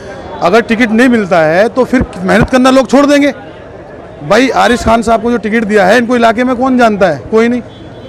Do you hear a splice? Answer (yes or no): no